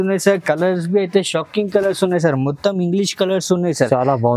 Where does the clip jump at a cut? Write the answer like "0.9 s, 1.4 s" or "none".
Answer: none